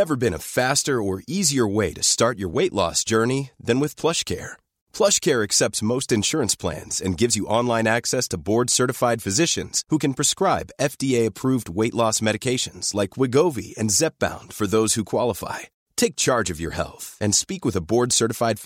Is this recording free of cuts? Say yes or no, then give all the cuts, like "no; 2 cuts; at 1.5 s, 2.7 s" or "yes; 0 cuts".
yes; 0 cuts